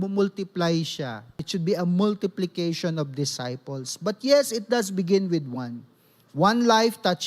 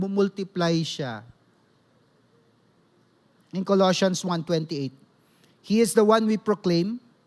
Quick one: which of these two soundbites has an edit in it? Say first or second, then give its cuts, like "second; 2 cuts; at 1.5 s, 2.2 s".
first; 1 cut; at 1.4 s